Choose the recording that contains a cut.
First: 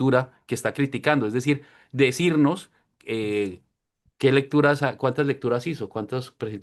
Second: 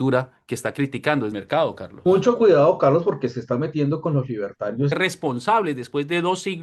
second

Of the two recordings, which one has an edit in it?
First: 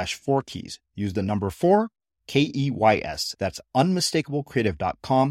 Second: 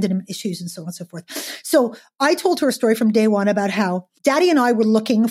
second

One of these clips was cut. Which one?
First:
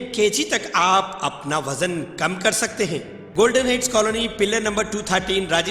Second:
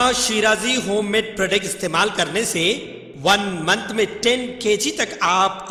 first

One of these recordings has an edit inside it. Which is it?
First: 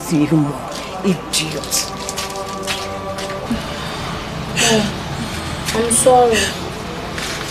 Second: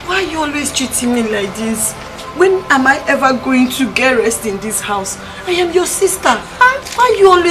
first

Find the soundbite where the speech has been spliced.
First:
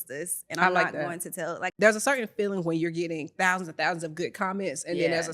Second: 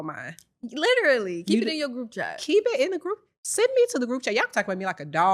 first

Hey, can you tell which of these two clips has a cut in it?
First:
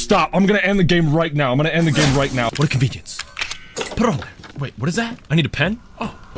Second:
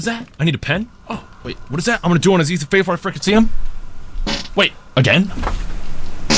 first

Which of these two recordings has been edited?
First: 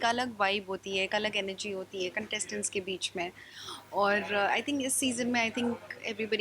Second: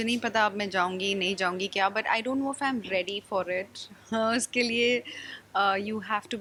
first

